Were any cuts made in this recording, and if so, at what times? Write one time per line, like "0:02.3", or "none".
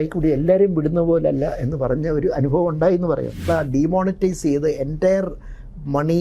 0:03.4